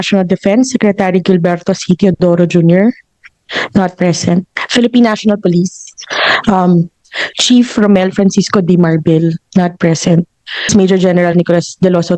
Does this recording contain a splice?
yes; 2 cuts; at 4.6 s, 10.7 s

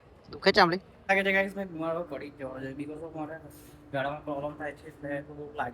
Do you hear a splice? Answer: yes; 1 cut; at 1.1 s

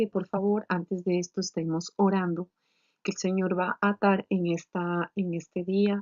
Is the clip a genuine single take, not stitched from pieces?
no; 1 cut; at 1.6 s

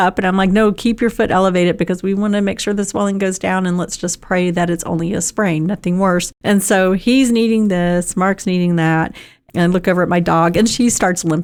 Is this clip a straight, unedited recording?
yes; 0 cuts

